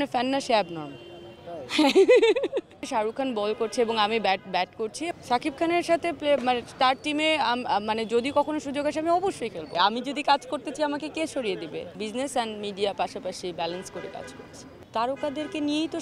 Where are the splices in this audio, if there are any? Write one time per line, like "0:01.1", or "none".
0:02.8
0:05.0
0:09.7
0:12.0
0:14.8